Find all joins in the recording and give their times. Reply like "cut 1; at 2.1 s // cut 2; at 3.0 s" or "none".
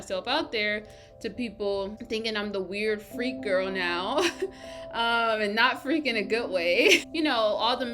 cut 1; at 2.0 s // cut 2; at 7.1 s